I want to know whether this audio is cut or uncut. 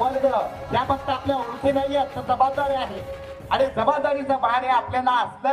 uncut